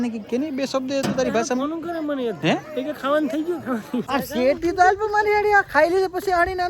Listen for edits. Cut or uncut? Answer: cut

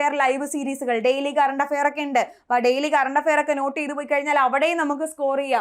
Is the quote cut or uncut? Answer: uncut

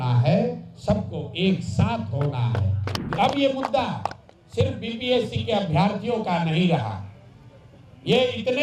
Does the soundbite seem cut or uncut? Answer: cut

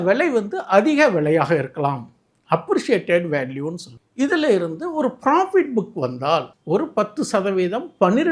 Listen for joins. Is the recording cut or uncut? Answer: cut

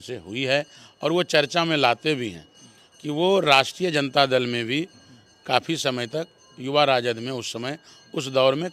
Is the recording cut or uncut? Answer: uncut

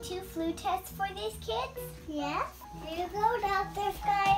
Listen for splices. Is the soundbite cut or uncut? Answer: cut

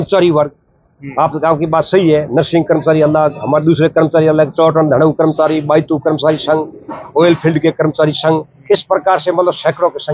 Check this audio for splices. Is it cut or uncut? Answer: uncut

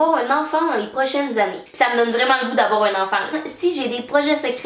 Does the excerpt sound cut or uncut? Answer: cut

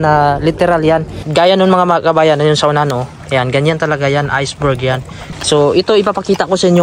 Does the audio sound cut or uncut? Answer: cut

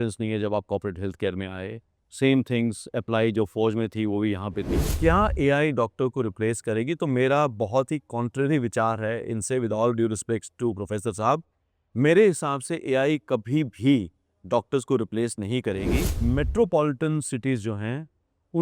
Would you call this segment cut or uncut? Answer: cut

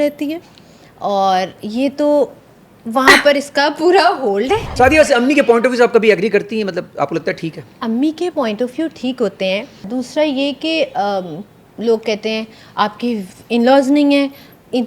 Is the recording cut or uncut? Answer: cut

